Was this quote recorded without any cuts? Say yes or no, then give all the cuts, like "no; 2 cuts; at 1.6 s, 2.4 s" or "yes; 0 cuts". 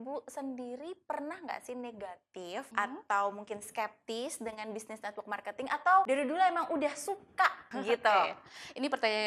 no; 3 cuts; at 2.7 s, 6.1 s, 7.7 s